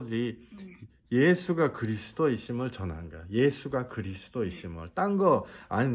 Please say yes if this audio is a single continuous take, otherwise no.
yes